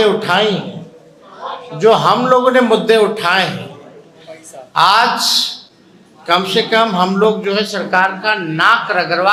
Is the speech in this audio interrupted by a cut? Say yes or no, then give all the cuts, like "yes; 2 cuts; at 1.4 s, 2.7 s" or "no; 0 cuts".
no; 0 cuts